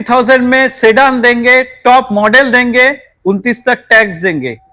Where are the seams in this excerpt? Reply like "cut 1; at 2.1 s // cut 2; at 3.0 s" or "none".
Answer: none